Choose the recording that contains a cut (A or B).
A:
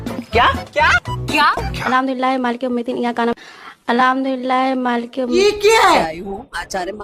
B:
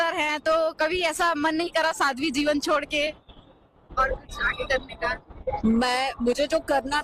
A